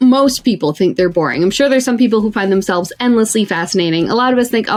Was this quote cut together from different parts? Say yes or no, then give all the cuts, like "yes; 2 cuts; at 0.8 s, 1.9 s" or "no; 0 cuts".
no; 0 cuts